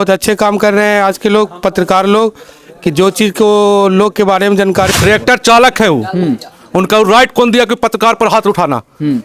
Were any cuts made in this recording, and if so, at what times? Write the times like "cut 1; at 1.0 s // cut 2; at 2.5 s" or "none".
cut 1; at 4.9 s